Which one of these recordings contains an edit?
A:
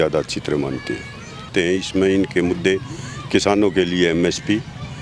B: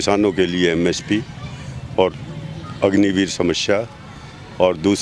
A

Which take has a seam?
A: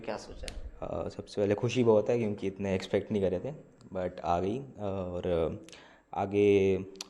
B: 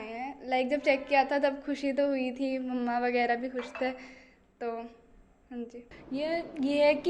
B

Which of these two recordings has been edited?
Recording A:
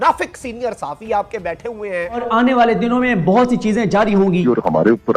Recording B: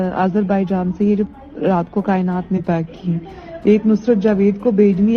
A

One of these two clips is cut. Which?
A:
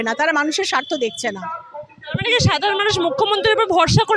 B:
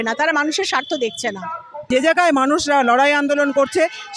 B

